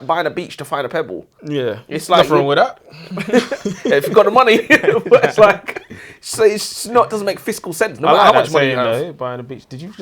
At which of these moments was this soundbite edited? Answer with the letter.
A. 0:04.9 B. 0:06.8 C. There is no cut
C